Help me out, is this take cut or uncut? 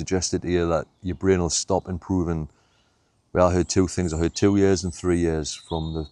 uncut